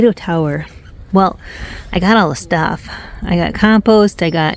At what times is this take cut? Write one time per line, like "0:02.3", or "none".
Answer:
none